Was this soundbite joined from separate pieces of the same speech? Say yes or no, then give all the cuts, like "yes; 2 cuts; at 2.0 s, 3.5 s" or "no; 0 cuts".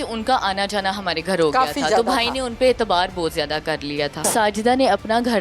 yes; 1 cut; at 4.2 s